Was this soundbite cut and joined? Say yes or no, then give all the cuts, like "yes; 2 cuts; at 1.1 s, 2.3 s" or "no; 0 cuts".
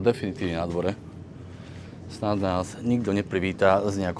no; 0 cuts